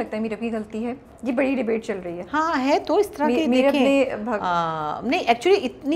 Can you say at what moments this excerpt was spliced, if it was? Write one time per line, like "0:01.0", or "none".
none